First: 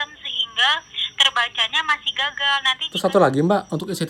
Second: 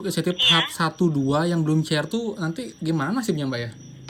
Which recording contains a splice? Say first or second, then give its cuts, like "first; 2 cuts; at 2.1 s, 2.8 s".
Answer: first; 1 cut; at 2.9 s